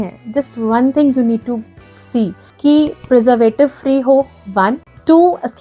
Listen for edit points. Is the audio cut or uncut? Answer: uncut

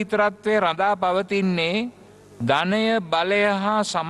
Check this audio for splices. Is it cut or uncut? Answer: uncut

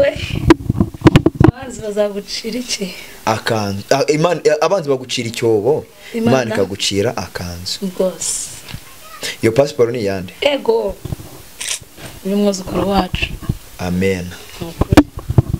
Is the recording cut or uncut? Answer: uncut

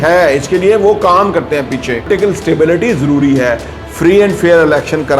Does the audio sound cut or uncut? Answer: cut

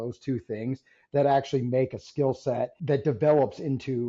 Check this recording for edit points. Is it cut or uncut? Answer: cut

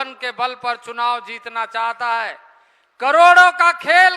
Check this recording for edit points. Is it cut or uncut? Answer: uncut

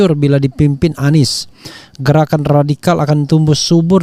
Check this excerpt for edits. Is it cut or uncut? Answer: uncut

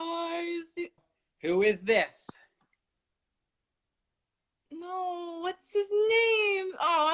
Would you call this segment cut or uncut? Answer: cut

